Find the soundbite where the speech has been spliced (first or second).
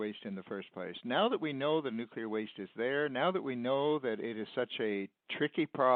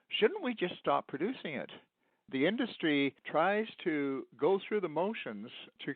second